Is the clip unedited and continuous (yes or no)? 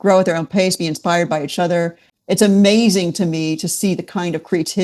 yes